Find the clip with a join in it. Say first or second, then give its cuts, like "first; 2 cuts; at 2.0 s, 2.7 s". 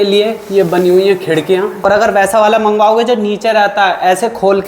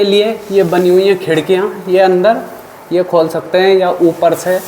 first; 1 cut; at 1.8 s